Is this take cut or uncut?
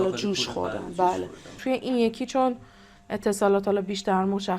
cut